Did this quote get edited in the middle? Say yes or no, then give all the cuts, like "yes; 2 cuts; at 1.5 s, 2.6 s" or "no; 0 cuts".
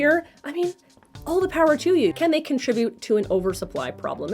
yes; 1 cut; at 2.1 s